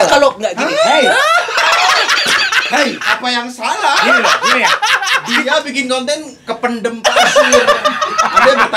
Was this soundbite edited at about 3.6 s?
no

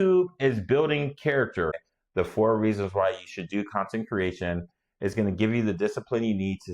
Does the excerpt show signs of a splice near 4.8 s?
no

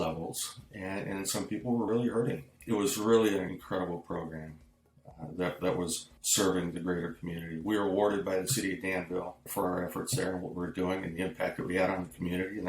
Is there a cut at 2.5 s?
yes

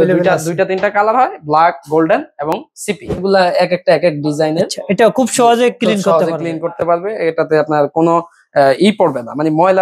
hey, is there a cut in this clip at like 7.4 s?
no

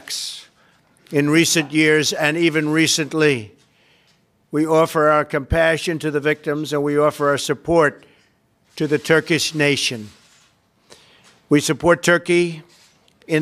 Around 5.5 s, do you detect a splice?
yes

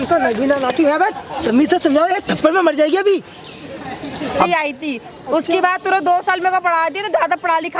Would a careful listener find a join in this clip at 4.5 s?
yes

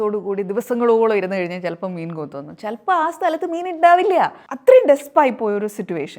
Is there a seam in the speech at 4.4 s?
yes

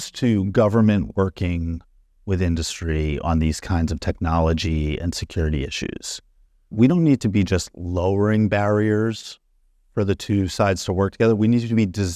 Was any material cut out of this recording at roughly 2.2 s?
no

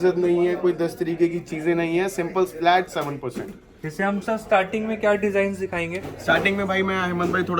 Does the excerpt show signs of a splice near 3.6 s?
no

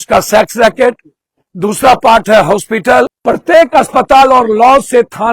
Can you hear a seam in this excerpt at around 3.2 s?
yes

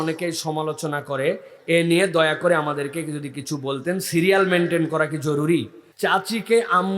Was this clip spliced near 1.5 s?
no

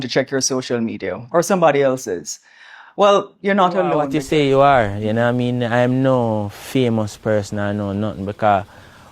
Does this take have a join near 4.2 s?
yes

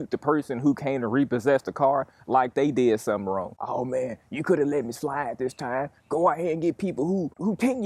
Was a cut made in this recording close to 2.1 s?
no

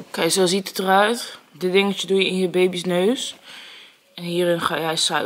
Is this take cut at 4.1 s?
no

